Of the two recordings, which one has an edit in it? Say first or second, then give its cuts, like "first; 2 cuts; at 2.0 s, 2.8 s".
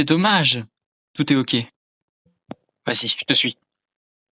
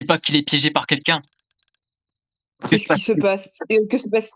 first; 1 cut; at 2.3 s